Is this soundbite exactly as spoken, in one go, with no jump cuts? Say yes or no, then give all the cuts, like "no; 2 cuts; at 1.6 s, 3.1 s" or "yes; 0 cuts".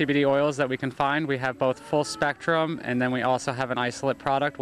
yes; 0 cuts